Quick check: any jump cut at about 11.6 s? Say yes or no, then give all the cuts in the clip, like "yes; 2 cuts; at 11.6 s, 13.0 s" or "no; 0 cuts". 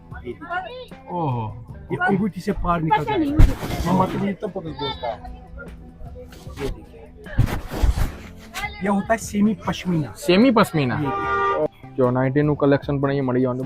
yes; 1 cut; at 11.6 s